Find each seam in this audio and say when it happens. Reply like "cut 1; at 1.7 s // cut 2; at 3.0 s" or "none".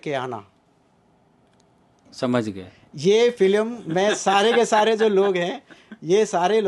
none